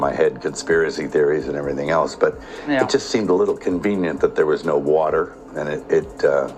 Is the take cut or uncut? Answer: uncut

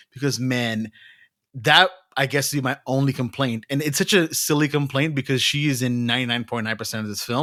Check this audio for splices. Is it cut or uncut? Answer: uncut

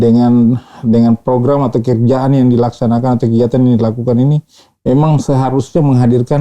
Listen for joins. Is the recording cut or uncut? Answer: uncut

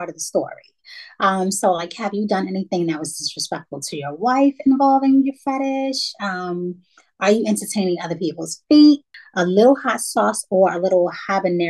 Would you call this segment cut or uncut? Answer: cut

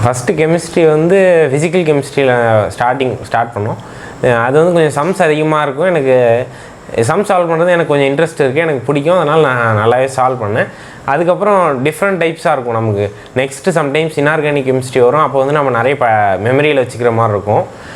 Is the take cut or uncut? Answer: uncut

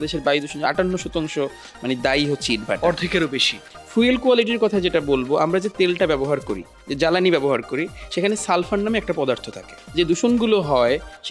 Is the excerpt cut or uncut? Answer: cut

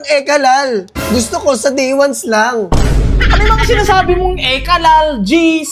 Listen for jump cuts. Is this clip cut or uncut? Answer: uncut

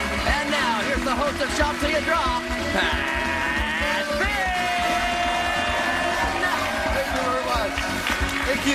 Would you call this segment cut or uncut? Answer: cut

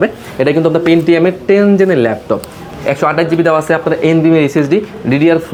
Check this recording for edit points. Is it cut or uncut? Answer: uncut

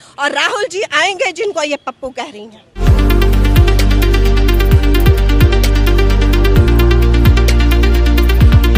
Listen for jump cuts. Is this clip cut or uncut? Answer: uncut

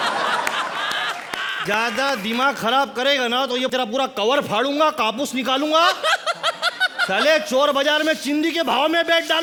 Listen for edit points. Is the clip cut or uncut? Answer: uncut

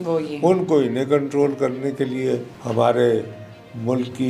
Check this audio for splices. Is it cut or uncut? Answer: cut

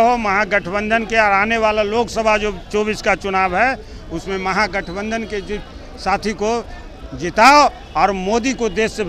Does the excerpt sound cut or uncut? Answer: uncut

